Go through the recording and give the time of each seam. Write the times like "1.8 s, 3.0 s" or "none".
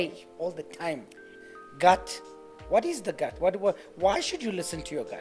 1.3 s